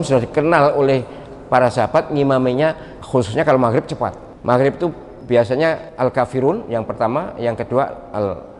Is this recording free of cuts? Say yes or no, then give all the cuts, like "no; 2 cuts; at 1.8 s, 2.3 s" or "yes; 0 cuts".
no; 4 cuts; at 2.9 s, 4.3 s, 5.1 s, 5.9 s